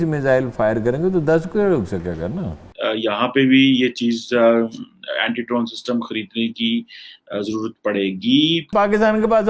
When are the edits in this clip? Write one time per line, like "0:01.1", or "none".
0:02.6
0:08.7

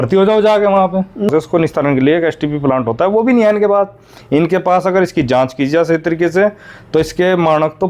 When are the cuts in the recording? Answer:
0:01.3

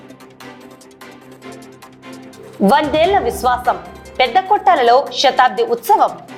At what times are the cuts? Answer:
none

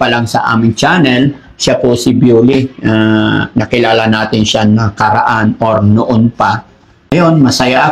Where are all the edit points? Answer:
0:07.0

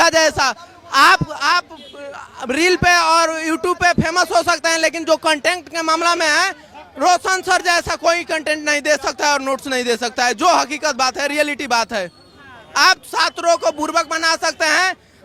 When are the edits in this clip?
none

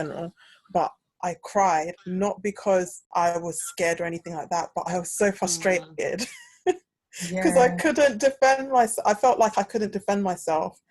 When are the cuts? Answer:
0:03.0

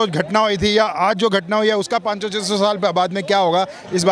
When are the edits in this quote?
none

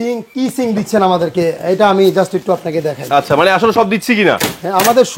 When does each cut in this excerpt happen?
none

